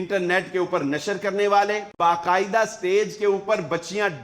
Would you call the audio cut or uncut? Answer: cut